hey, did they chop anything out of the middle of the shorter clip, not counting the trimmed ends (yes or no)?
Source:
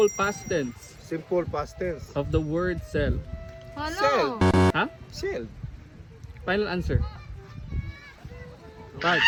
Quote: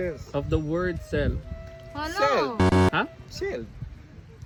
no